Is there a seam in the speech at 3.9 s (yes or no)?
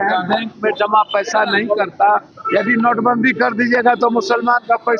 no